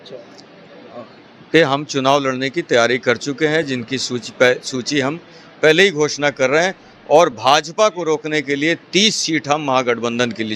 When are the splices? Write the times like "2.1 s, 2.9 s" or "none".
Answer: none